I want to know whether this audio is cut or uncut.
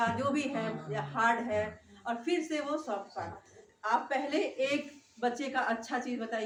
uncut